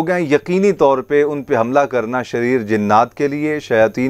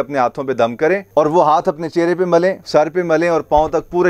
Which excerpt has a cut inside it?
second; 1 cut; at 2.6 s

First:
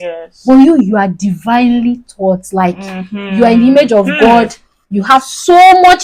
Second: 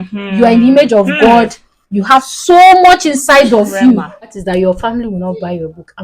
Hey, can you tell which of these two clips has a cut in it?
second; 1 cut; at 4.4 s

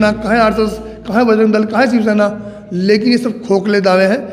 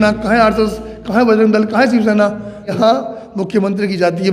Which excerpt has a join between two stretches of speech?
second; 1 cut; at 2.8 s

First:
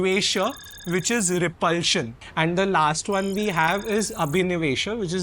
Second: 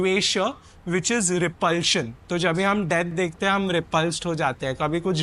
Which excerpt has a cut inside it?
first; 1 cut; at 2.2 s

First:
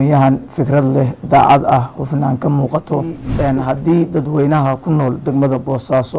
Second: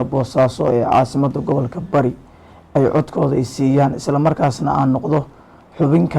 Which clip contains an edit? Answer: first; 1 cut; at 3.3 s

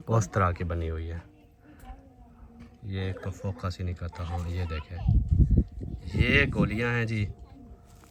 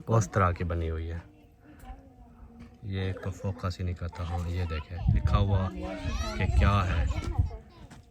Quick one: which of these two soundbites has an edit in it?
second; 1 cut; at 5.2 s

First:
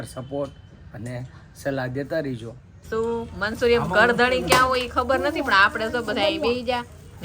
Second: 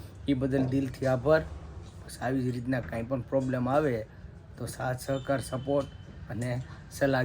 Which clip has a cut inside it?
first; 1 cut; at 2.8 s

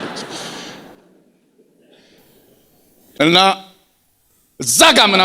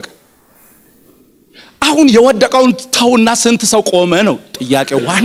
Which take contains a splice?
first; 1 cut; at 3.2 s

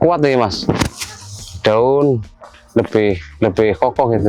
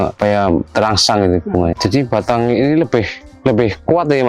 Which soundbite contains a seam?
second; 1 cut; at 1.8 s

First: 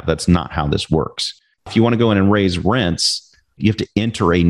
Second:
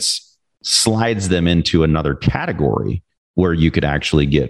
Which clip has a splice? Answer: first; 2 cuts; at 1.7 s, 3.6 s

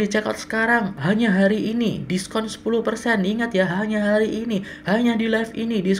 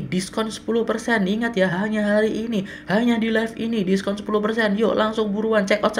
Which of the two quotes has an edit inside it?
first; 1 cut; at 0.9 s

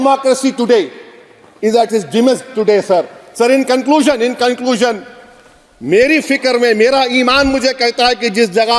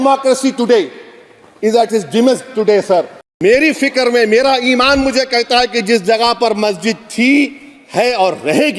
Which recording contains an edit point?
second; 1 cut; at 3.2 s

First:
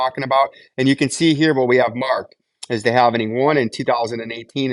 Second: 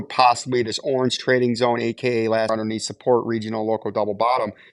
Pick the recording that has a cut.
second; 1 cut; at 2.5 s

